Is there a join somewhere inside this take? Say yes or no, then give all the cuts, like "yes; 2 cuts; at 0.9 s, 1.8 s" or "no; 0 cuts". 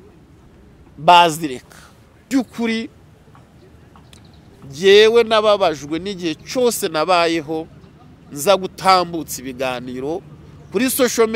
yes; 1 cut; at 2.3 s